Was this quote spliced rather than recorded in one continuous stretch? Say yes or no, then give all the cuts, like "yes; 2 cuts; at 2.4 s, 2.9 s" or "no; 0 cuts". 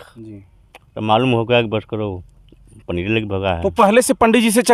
no; 0 cuts